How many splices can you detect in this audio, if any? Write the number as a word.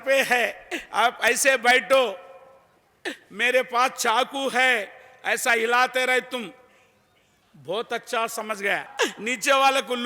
one